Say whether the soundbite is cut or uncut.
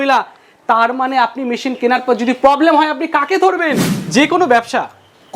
cut